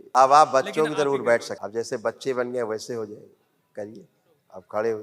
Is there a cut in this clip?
yes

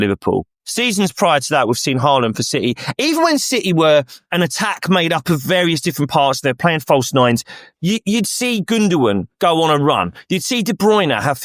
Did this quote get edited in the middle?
no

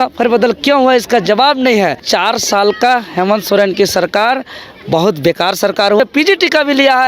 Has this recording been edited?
yes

